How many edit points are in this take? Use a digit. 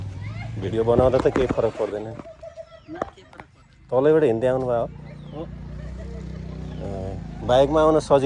0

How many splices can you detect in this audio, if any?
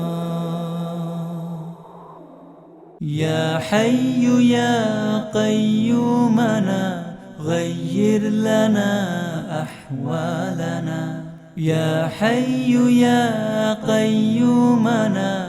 1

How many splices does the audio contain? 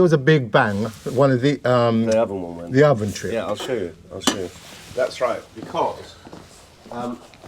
0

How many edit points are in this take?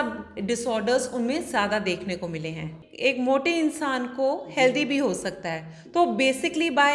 1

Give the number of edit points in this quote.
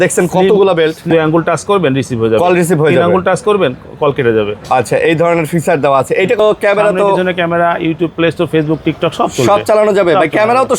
2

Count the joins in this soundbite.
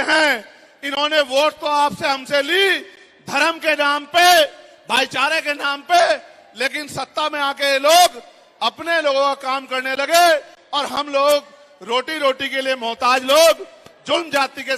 1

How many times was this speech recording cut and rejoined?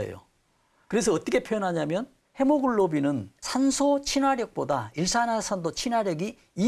2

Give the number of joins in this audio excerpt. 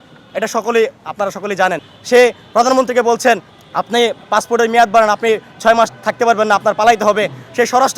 2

